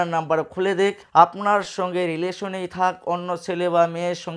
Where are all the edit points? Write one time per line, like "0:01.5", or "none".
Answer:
0:01.0